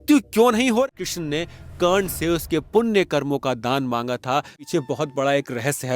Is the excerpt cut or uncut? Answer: cut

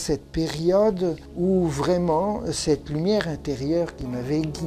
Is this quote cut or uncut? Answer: uncut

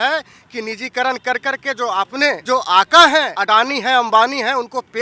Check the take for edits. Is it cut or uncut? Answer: cut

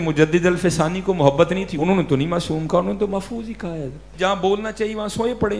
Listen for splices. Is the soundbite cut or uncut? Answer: cut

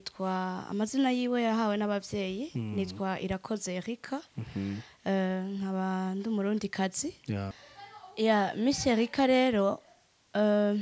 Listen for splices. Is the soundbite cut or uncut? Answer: cut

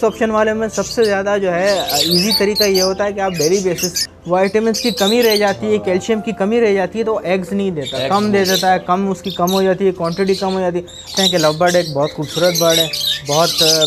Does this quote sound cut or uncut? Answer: cut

